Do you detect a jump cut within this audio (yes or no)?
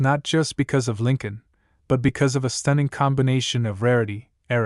yes